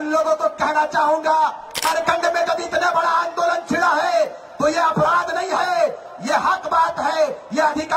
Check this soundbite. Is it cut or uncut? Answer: cut